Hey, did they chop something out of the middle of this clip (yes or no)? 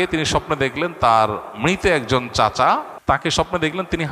yes